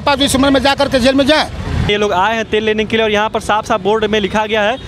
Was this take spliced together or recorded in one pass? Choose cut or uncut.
cut